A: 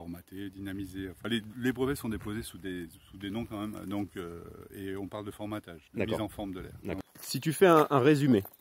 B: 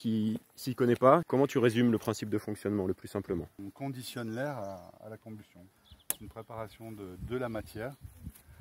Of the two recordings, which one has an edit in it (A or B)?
A